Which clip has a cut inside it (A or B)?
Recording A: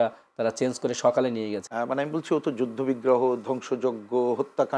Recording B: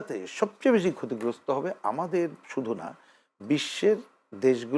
A